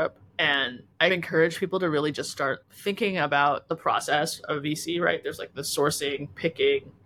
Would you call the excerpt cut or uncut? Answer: uncut